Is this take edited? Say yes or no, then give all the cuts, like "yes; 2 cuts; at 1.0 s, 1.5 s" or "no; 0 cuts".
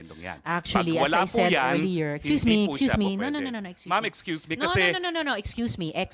no; 0 cuts